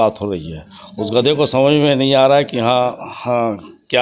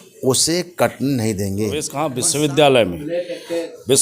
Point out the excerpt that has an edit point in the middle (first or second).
second